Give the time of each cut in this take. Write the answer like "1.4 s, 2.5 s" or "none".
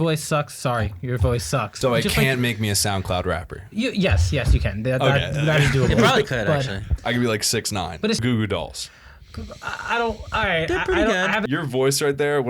1.7 s, 8.2 s, 11.4 s